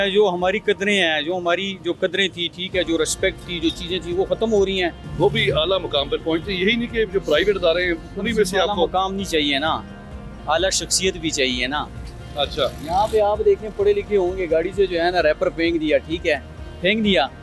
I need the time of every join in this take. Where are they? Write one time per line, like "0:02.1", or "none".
0:05.0